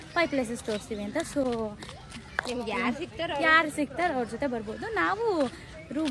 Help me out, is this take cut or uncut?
uncut